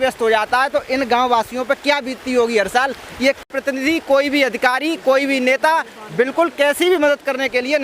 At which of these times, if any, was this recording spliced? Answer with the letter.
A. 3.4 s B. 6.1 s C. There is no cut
A